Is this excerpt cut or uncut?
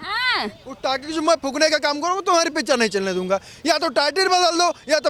uncut